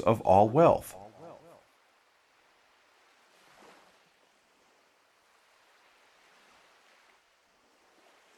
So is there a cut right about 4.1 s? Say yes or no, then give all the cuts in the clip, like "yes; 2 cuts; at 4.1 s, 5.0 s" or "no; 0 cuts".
no; 1 cut; at 1.6 s